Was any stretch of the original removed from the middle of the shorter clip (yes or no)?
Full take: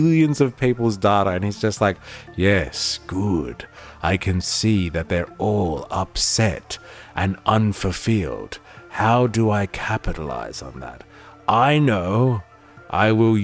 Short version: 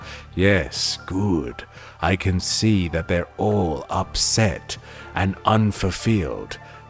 no